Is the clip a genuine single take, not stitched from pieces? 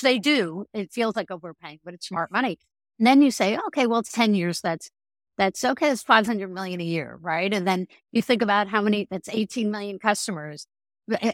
yes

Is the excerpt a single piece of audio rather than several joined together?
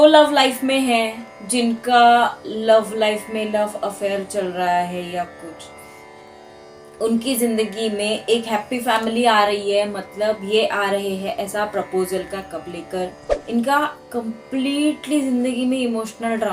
no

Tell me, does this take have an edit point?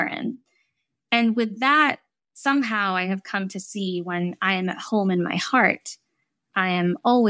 no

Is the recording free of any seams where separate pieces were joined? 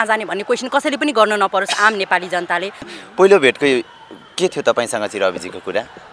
no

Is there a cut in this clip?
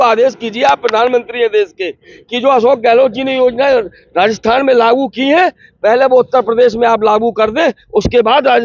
no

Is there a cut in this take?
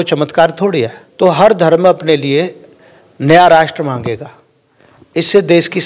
yes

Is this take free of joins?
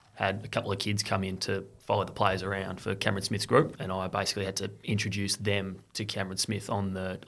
no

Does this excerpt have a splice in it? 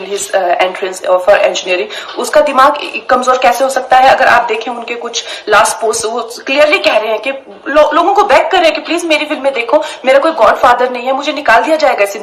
no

